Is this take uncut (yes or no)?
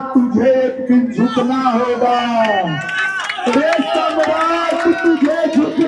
yes